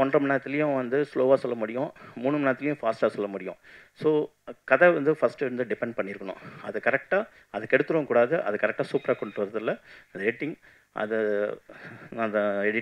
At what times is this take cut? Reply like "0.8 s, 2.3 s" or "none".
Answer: none